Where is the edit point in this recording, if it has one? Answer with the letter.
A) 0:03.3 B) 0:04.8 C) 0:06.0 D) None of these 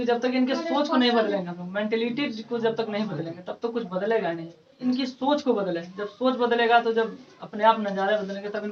B